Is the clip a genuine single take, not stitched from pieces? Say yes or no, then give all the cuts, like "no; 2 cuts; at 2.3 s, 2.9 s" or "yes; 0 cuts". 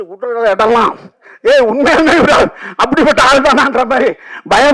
yes; 0 cuts